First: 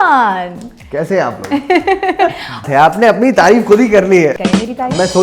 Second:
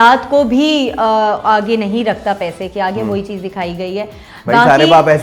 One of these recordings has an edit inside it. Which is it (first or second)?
first